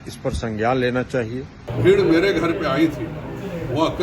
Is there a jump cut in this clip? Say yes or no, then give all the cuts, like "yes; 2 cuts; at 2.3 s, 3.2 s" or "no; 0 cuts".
yes; 1 cut; at 1.6 s